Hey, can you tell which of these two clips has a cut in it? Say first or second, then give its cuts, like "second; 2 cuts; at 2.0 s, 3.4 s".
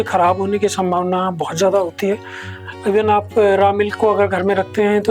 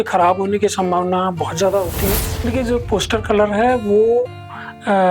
second; 1 cut; at 2.3 s